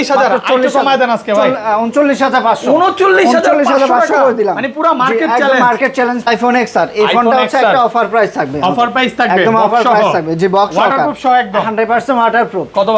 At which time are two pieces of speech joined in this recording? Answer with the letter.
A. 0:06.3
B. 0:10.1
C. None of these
A